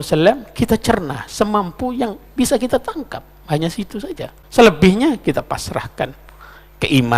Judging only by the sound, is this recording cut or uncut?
cut